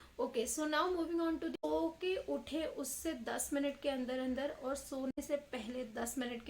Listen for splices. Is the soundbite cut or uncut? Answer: cut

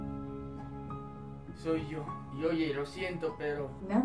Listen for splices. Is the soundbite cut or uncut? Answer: uncut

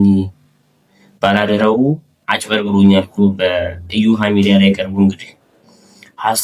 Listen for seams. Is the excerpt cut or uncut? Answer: uncut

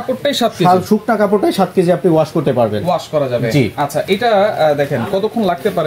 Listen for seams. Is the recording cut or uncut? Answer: uncut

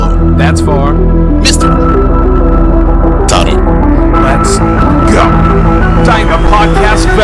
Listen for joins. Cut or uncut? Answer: uncut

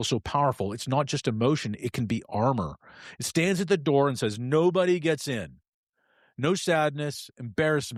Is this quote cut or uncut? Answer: uncut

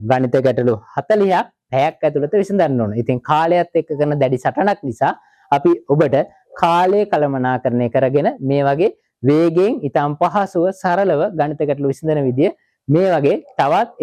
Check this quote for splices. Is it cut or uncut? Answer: uncut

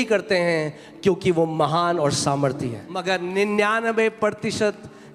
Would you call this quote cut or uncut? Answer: cut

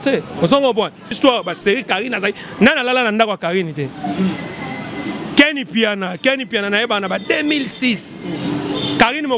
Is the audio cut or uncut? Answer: cut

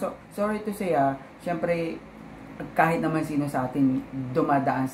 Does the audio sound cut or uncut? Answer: uncut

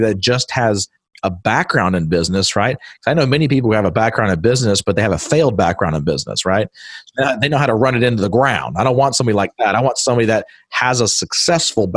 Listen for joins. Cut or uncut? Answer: uncut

